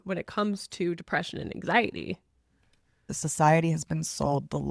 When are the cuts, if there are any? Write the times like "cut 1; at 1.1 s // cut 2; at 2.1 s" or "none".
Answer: cut 1; at 3.0 s

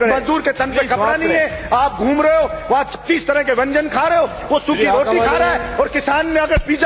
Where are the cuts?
none

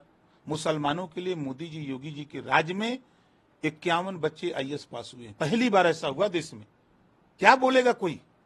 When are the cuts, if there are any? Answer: none

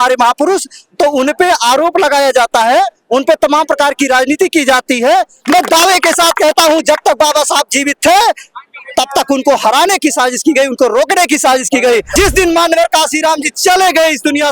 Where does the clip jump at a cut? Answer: cut 1; at 5.4 s // cut 2; at 12.1 s

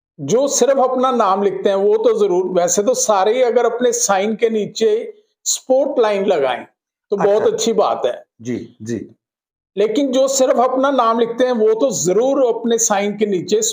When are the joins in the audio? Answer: none

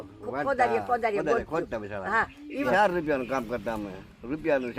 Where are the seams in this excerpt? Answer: cut 1; at 2.6 s

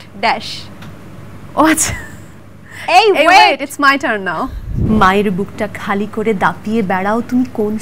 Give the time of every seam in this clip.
cut 1; at 4.7 s

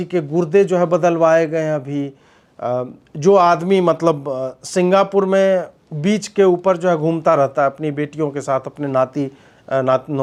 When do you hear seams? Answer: none

